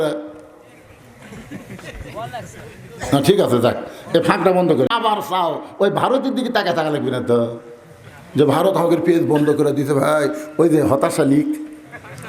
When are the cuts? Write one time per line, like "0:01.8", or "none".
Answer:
0:04.9